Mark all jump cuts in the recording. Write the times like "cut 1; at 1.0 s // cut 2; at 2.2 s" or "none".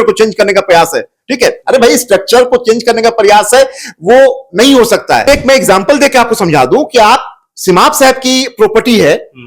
cut 1; at 5.3 s

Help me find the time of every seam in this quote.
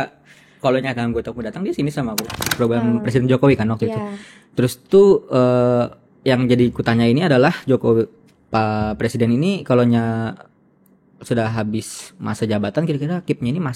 cut 1; at 2.5 s

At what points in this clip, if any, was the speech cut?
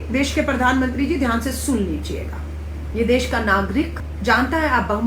none

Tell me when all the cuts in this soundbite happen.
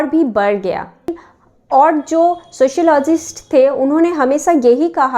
cut 1; at 1.0 s

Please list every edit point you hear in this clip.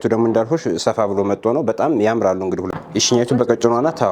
none

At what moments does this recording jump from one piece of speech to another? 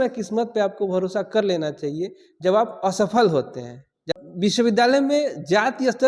cut 1; at 4.1 s

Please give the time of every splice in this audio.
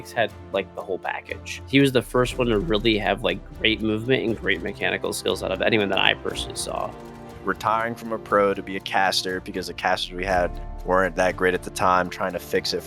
cut 1; at 1.6 s // cut 2; at 7.1 s

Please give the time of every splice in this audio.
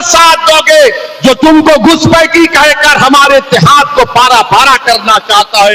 none

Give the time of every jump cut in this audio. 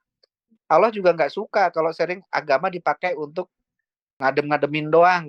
cut 1; at 4.2 s

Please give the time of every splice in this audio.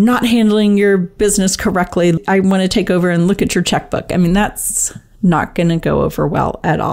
cut 1; at 2.2 s

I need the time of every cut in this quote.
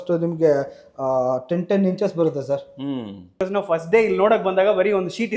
cut 1; at 3.4 s

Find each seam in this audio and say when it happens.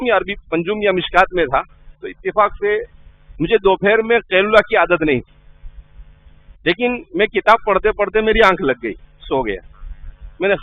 none

